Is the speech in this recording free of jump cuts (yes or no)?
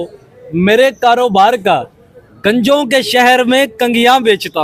yes